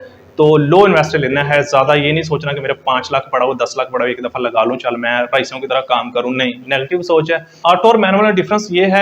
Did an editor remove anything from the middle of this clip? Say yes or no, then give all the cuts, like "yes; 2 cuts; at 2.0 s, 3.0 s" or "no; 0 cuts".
yes; 1 cut; at 7.5 s